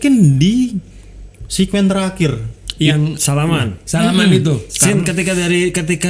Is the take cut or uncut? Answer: uncut